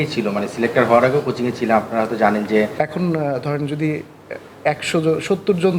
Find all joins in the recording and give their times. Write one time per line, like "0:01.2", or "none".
0:02.7